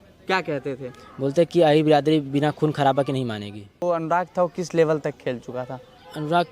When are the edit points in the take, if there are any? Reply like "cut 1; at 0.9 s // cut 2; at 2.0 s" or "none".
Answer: cut 1; at 3.8 s